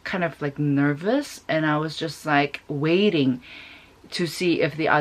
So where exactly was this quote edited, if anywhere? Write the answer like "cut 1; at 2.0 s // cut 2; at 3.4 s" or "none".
none